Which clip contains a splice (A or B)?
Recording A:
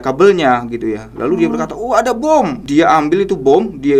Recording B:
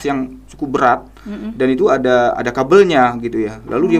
A